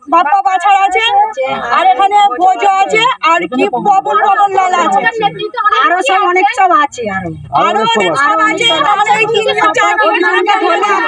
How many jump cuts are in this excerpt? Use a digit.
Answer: 0